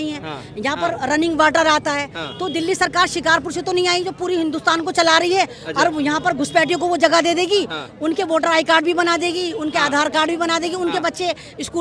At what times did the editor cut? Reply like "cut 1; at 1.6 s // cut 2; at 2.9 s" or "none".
none